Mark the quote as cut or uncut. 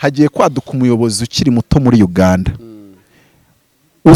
uncut